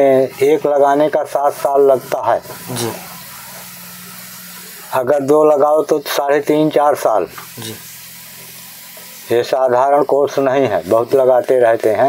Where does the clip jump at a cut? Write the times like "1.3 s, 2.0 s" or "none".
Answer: none